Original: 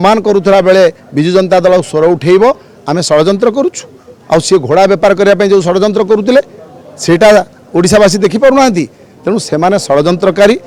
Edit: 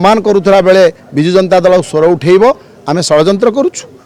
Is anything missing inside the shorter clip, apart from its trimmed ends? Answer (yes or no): no